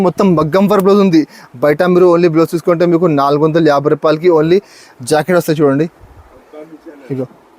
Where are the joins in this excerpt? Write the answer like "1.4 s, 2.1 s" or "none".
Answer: none